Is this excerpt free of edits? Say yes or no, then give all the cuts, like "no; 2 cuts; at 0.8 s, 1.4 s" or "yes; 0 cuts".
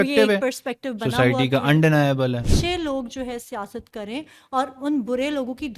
no; 1 cut; at 2.5 s